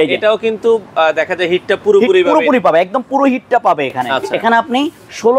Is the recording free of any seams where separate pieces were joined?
no; 1 cut; at 4.1 s

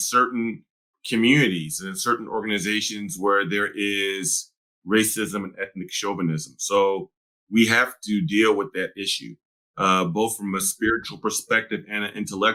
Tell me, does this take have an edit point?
no; 0 cuts

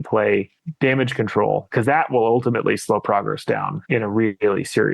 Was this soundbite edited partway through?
yes; 2 cuts; at 1.7 s, 3.8 s

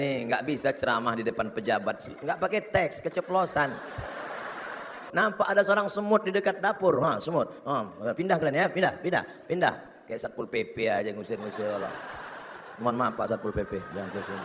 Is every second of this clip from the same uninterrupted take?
no; 1 cut; at 5.0 s

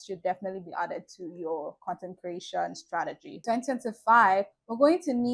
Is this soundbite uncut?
no; 1 cut; at 3.4 s

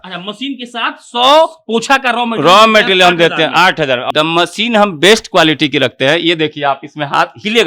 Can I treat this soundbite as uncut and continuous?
no; 1 cut; at 4.0 s

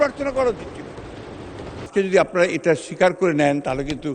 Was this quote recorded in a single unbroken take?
no; 1 cut; at 1.9 s

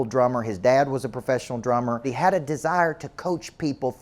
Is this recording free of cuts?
no; 1 cut; at 2.1 s

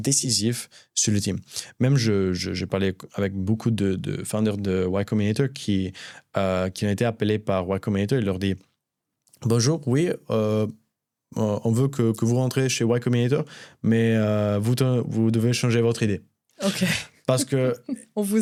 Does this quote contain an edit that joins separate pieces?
no; 0 cuts

